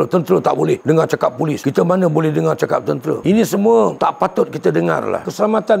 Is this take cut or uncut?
uncut